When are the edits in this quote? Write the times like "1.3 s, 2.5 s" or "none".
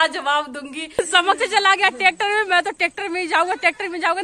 1.0 s